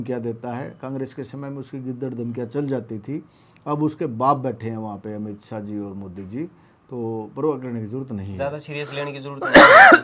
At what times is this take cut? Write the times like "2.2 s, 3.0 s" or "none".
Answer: none